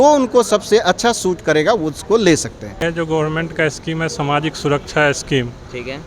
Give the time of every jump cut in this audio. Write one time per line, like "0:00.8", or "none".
0:02.8